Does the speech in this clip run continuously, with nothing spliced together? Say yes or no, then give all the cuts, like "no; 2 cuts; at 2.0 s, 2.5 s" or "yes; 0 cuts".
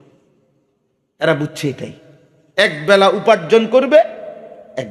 yes; 0 cuts